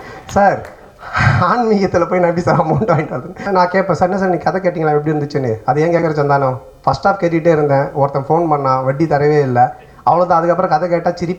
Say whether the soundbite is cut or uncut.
cut